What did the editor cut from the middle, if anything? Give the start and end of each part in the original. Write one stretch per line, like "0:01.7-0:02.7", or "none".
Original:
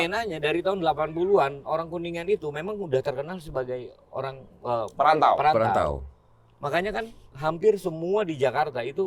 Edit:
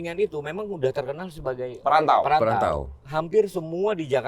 0:03.9-0:04.9
0:06.1-0:07.3